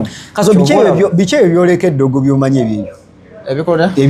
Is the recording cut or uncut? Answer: uncut